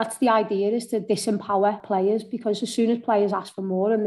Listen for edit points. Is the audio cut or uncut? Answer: cut